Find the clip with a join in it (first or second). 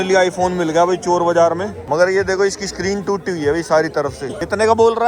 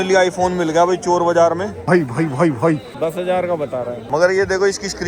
second